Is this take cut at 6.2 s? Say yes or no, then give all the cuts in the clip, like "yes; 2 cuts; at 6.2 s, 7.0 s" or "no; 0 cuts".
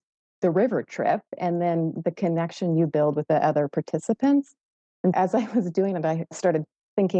yes; 3 cuts; at 3.2 s, 5.1 s, 6.2 s